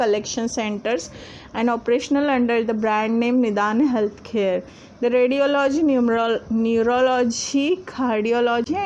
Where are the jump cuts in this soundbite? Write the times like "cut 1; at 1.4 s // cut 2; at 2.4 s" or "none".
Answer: cut 1; at 2.3 s